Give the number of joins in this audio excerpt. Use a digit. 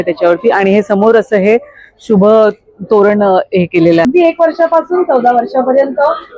1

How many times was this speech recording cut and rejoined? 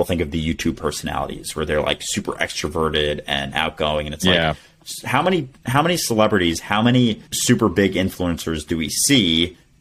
1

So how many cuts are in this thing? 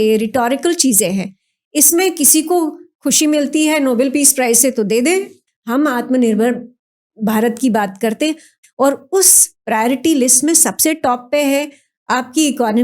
2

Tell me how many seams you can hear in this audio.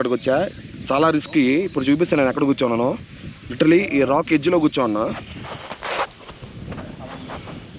0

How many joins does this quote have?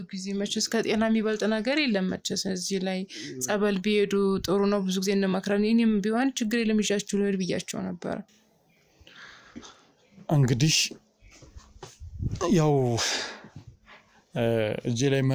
1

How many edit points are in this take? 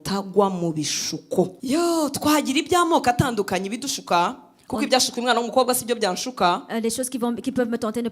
1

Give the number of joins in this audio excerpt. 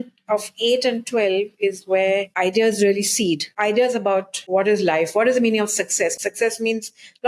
4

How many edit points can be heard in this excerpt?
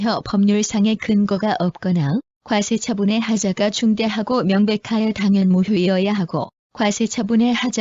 1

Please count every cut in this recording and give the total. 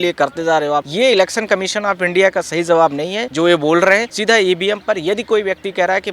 3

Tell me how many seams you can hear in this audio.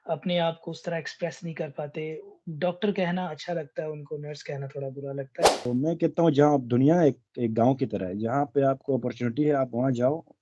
1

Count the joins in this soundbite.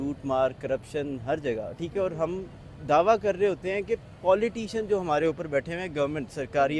0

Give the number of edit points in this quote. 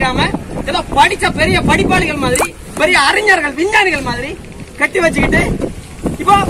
0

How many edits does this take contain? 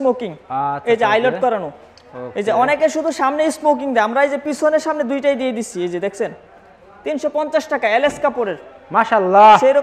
0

